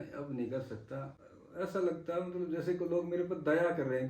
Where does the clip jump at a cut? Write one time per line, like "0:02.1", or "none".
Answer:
0:01.2